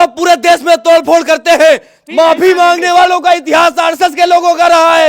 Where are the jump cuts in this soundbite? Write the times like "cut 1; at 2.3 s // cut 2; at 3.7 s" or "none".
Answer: cut 1; at 2.0 s